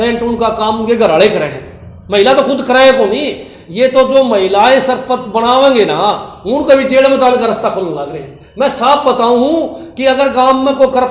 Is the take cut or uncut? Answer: uncut